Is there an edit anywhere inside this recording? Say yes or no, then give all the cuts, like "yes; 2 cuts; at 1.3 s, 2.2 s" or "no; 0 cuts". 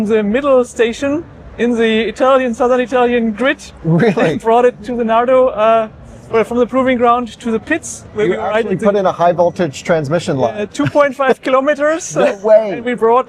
no; 0 cuts